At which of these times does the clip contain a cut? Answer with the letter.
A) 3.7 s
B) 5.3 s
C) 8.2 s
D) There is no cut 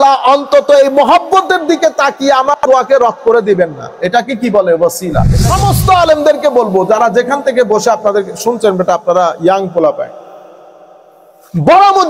B